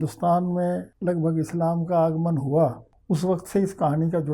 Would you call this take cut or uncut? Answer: cut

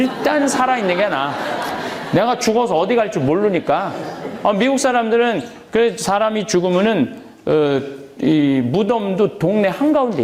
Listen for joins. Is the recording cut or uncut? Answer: uncut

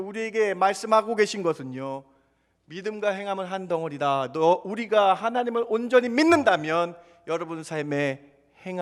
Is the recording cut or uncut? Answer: uncut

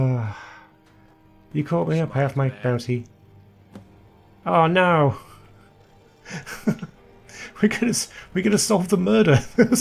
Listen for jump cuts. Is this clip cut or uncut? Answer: uncut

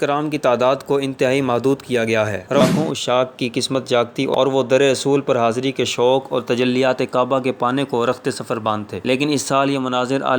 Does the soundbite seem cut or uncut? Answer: cut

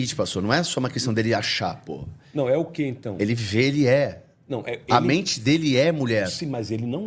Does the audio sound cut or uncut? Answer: uncut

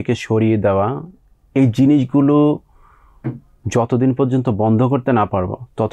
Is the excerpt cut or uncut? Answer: uncut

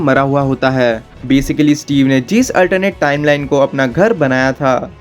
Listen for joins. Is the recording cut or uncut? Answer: cut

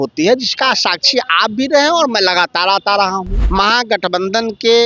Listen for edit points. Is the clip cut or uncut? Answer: cut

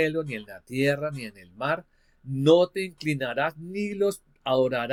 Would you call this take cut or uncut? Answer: uncut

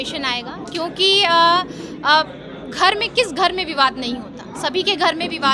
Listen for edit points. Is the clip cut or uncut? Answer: uncut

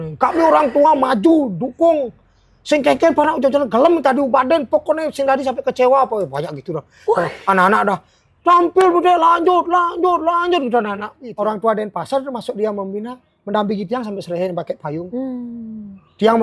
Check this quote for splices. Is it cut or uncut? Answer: cut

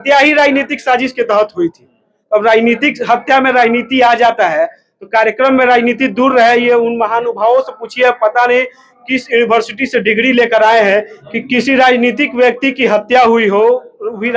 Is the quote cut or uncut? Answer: uncut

